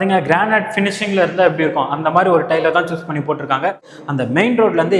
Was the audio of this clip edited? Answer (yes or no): yes